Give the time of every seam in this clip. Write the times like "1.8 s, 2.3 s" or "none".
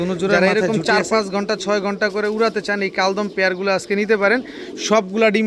none

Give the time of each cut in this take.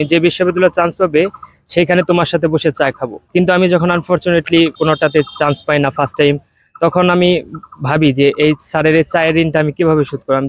4.8 s

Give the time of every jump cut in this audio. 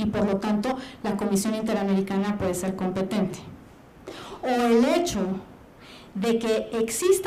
none

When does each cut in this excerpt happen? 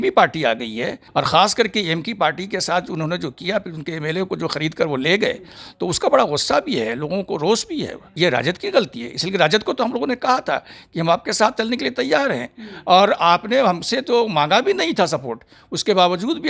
1.0 s, 8.1 s

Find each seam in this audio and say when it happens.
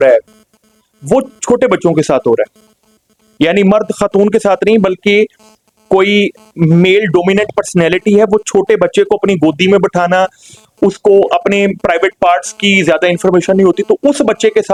none

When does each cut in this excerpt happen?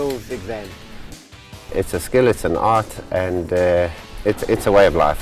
1.3 s, 4.0 s

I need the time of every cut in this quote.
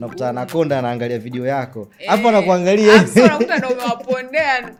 none

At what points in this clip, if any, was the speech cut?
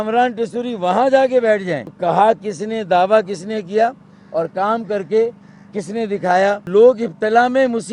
1.9 s, 6.7 s

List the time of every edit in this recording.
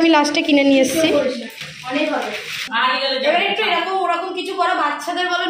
2.6 s

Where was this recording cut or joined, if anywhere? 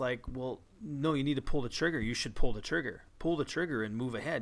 2.6 s

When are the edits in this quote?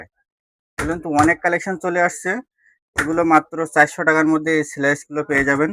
none

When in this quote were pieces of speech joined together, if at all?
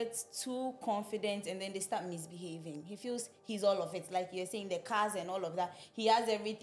none

